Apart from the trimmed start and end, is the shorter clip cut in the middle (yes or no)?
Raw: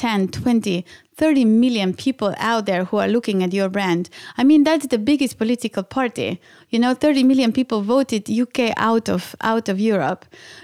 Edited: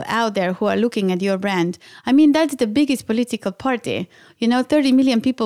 no